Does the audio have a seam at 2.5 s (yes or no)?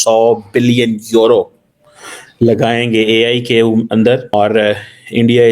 no